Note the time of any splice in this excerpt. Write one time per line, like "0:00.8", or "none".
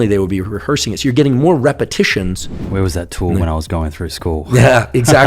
0:02.5